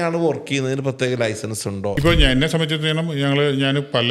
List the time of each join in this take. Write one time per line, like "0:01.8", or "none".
0:02.0